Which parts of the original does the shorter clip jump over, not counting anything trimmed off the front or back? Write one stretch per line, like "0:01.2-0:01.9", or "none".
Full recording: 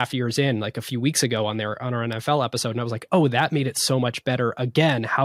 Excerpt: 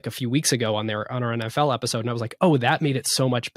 none